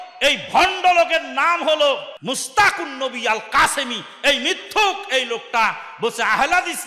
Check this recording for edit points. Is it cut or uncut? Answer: cut